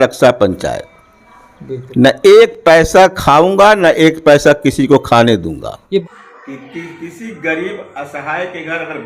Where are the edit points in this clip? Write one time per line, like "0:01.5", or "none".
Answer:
0:06.0